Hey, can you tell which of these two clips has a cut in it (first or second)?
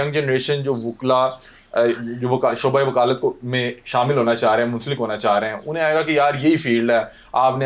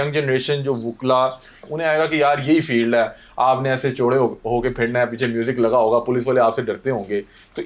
second